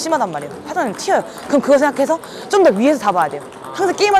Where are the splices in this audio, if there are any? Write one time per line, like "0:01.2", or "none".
none